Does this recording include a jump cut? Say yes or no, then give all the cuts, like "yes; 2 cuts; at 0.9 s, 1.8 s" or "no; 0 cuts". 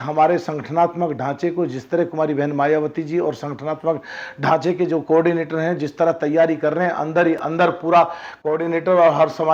no; 0 cuts